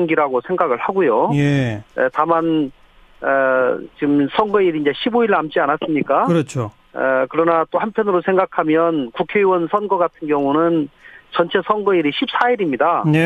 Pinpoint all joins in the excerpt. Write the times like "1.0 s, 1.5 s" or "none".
6.5 s